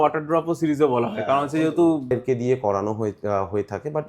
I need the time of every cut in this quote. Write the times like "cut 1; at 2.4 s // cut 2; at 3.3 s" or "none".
cut 1; at 2.1 s